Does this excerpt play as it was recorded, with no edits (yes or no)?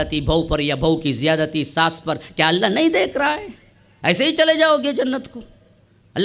yes